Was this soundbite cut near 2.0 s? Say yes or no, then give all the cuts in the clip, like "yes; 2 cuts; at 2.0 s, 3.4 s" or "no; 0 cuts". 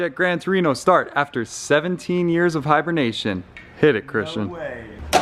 no; 0 cuts